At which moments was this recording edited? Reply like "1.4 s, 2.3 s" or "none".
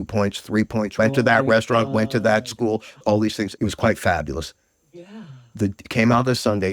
0.9 s, 3.0 s